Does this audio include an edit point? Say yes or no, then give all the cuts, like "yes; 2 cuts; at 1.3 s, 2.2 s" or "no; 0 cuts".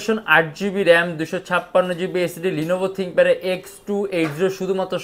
no; 0 cuts